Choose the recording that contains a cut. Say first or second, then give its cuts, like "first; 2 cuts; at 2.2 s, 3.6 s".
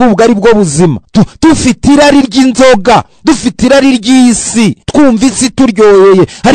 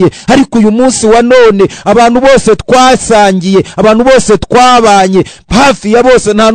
first; 2 cuts; at 1.0 s, 4.8 s